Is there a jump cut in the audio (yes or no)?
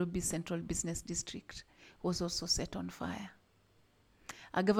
no